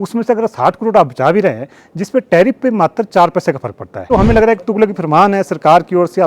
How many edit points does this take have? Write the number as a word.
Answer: one